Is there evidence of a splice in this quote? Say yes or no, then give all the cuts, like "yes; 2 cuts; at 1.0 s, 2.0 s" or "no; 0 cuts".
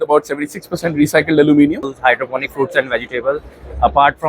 yes; 1 cut; at 1.9 s